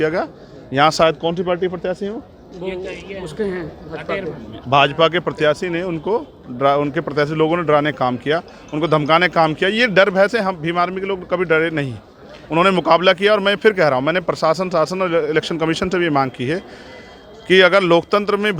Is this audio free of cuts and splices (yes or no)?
yes